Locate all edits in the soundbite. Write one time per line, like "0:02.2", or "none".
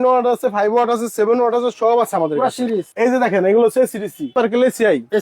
0:02.9
0:04.3